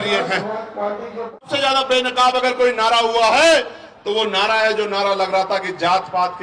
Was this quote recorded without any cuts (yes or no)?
no